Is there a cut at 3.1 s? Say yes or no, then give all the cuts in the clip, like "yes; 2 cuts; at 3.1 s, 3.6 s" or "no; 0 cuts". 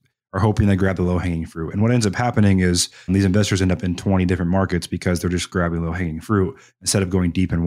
yes; 1 cut; at 3.1 s